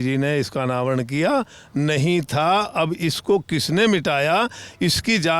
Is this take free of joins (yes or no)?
yes